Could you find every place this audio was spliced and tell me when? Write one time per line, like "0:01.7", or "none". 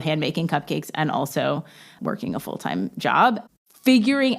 0:01.9